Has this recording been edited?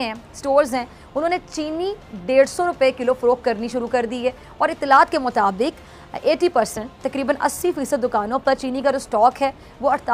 no; 0 cuts

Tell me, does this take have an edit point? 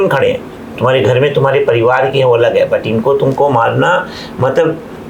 no; 0 cuts

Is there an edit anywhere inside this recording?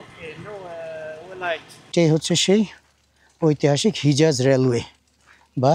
yes; 1 cut; at 1.9 s

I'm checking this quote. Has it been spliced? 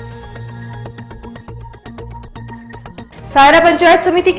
no; 0 cuts

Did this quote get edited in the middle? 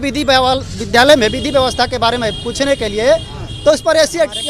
no; 0 cuts

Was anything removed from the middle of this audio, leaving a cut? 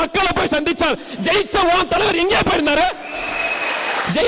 no; 0 cuts

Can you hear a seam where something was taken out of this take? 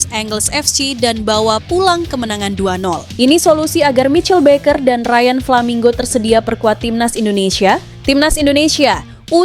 yes; 2 cuts; at 3.1 s, 7.9 s

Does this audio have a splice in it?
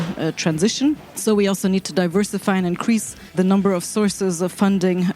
yes; 2 cuts; at 1.1 s, 3.4 s

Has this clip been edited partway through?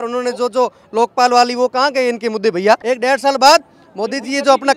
yes; 1 cut; at 2.9 s

